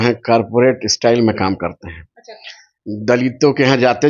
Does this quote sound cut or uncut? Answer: uncut